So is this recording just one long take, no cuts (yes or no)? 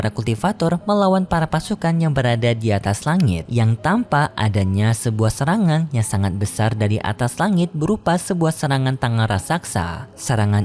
yes